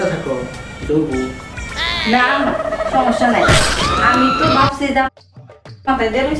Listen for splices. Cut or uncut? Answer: uncut